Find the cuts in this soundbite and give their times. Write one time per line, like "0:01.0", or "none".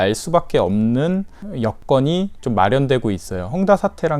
0:01.6